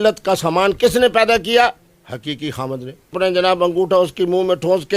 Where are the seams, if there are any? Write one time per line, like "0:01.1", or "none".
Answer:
0:03.1